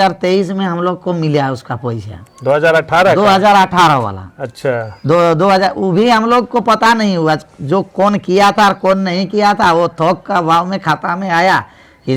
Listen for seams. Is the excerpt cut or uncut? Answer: uncut